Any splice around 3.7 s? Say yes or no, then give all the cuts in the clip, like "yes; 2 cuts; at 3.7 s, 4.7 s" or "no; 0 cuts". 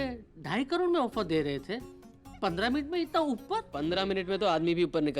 yes; 1 cut; at 3.7 s